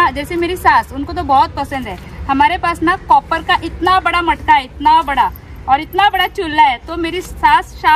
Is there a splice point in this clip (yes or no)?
no